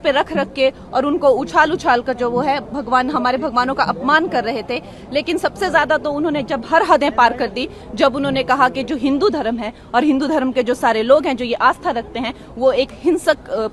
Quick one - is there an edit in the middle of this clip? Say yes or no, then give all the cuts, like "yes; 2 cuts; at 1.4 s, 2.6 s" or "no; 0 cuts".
no; 0 cuts